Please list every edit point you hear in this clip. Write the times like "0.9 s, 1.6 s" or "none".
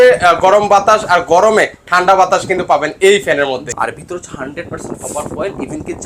3.7 s

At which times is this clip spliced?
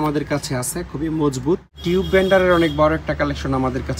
1.7 s

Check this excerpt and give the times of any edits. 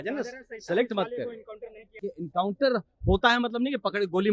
2.0 s

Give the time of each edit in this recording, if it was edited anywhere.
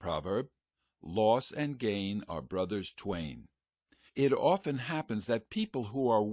none

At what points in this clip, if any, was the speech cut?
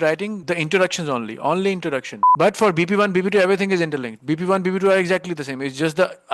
2.2 s

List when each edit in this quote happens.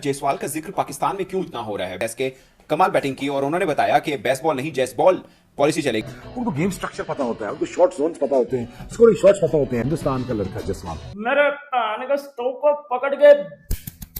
6.1 s, 11.0 s

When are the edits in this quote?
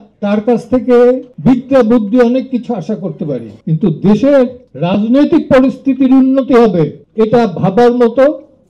7.0 s

